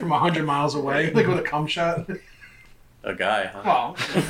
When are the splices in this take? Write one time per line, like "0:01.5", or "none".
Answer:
none